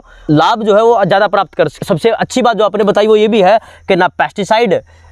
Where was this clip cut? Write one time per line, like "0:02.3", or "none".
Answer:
0:01.7

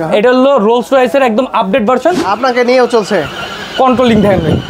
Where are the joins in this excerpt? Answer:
0:02.3

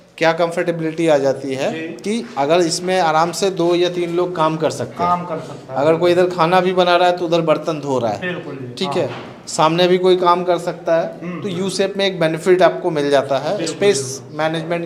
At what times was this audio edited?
none

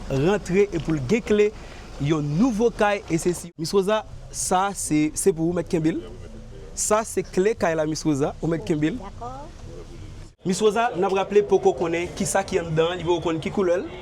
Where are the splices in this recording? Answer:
0:03.4
0:10.4

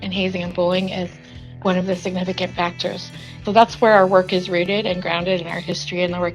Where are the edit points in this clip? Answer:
0:01.4
0:03.4

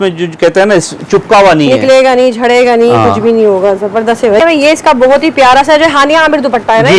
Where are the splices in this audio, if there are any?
0:04.4

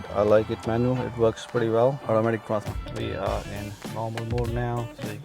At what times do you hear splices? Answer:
0:02.7

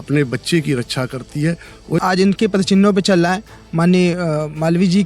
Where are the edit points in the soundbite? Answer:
0:02.0

